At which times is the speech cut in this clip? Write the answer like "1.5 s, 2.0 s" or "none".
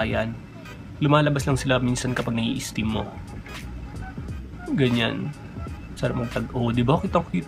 none